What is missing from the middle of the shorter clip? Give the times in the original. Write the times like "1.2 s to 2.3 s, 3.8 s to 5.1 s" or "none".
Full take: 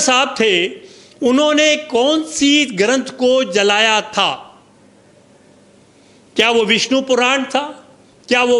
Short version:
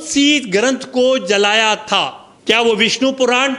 4.5 s to 6.1 s